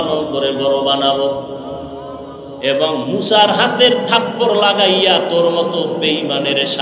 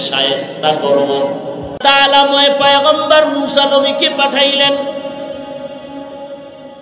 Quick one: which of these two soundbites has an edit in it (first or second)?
second